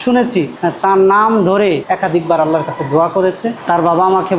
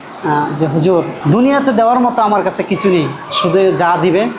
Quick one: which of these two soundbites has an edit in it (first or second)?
first